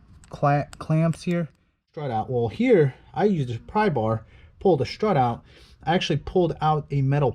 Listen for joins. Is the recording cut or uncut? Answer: cut